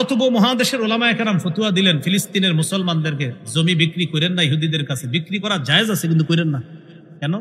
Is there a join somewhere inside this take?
no; 0 cuts

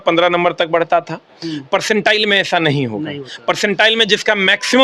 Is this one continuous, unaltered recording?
yes; 0 cuts

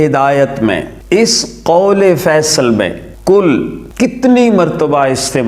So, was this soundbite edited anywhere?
yes; 3 cuts; at 0.9 s, 3.0 s, 3.8 s

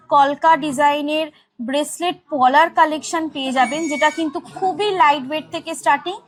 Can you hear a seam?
no; 0 cuts

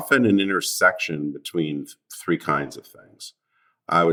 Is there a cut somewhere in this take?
no; 0 cuts

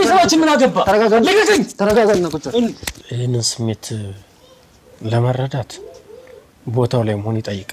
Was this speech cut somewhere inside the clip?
yes; 1 cut; at 2.9 s

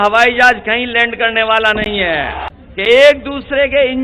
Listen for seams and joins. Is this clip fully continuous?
no; 1 cut; at 2.5 s

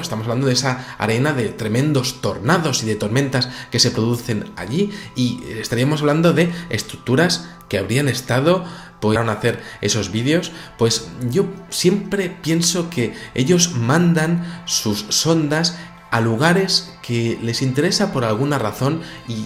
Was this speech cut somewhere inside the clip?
no; 0 cuts

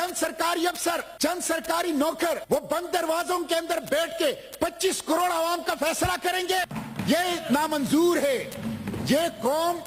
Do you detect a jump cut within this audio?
yes; 3 cuts; at 1.1 s, 2.4 s, 6.8 s

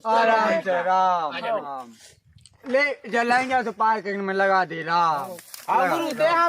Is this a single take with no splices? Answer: no; 1 cut; at 1.7 s

